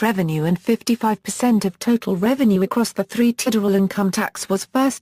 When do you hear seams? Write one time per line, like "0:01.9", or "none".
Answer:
none